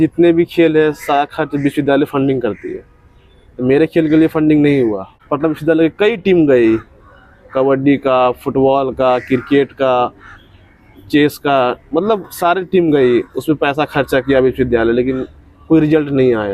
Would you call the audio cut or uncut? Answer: cut